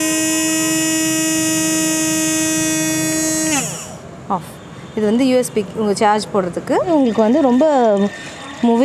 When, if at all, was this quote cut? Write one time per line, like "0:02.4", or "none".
0:06.9